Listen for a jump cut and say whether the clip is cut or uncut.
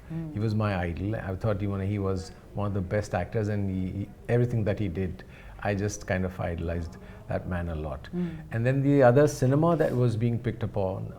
uncut